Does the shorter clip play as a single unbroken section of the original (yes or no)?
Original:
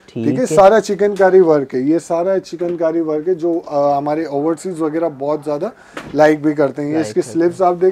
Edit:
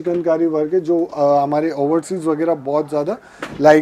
yes